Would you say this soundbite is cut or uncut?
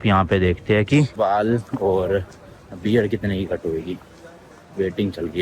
uncut